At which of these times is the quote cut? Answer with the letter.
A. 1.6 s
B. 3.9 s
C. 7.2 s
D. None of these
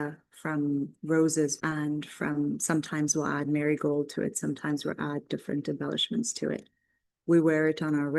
A